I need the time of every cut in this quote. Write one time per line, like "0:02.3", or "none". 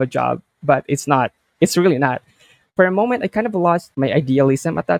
0:03.9